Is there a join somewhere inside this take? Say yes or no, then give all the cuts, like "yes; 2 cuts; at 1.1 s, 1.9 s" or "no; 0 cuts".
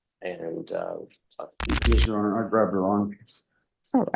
yes; 1 cut; at 1.7 s